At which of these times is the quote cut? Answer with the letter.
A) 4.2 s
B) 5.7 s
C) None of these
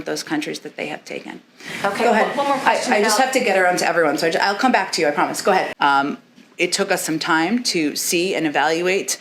B